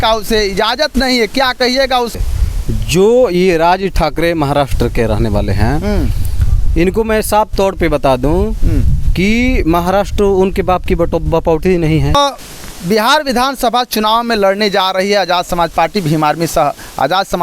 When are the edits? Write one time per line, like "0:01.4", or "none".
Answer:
0:02.3
0:12.2